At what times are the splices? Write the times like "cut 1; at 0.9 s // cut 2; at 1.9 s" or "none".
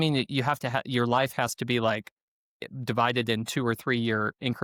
none